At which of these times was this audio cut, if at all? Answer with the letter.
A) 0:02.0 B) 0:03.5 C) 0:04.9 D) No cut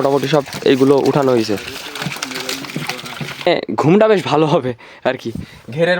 B